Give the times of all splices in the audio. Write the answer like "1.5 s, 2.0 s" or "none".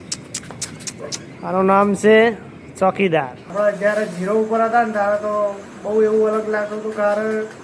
3.4 s